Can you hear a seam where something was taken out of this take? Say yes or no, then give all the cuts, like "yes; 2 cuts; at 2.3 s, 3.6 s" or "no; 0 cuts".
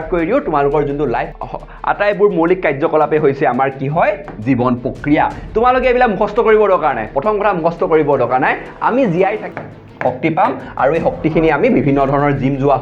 yes; 2 cuts; at 1.2 s, 9.4 s